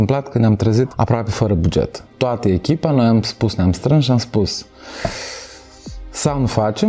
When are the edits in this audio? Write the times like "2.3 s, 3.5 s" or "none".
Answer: 0.9 s, 2.1 s